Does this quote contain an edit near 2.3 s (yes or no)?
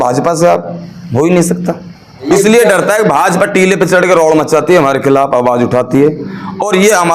yes